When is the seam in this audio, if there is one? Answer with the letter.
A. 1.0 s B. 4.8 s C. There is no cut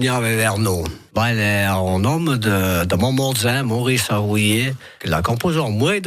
A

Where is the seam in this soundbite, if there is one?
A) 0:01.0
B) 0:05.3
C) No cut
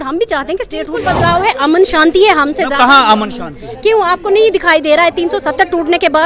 A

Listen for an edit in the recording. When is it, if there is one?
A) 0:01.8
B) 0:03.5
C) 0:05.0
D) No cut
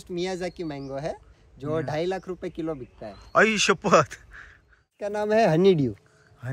C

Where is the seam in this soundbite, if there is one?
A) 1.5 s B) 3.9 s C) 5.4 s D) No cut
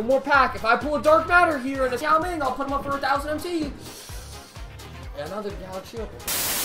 D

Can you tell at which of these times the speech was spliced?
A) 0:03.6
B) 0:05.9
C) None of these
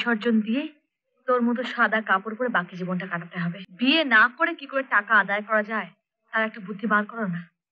A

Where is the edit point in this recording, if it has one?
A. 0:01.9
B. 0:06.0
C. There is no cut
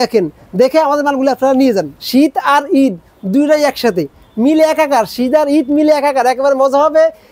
A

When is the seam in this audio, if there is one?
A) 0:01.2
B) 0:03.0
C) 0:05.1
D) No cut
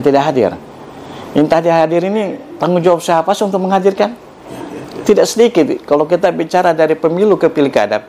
D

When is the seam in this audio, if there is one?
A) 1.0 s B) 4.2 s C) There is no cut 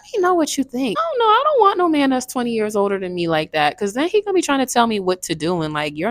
A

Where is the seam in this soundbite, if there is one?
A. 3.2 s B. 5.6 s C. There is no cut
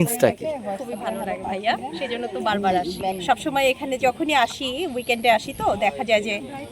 A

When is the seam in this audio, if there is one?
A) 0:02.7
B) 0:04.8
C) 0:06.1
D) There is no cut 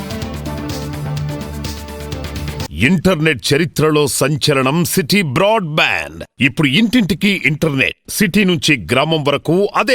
A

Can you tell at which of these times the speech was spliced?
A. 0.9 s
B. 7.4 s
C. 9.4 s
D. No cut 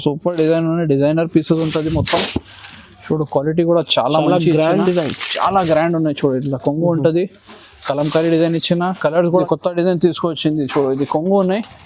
C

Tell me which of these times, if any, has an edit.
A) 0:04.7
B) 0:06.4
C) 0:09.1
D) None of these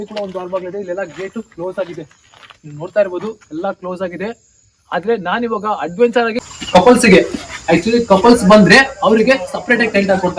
B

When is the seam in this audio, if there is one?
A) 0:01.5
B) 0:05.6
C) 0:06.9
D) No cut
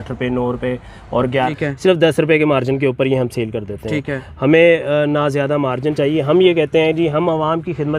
A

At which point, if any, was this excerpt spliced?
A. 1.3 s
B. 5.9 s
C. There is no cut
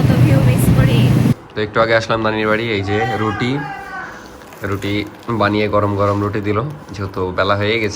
A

